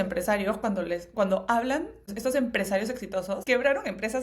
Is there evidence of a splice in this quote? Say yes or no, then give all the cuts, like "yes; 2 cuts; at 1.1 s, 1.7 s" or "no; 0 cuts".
yes; 2 cuts; at 2.1 s, 3.4 s